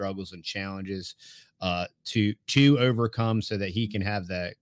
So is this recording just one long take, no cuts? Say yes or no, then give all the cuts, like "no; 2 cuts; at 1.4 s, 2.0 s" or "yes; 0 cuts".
yes; 0 cuts